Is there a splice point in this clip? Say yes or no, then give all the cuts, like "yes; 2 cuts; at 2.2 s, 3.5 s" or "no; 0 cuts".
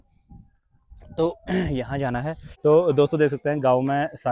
yes; 1 cut; at 2.5 s